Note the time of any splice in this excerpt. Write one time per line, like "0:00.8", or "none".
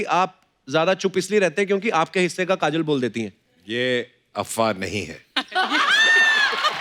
none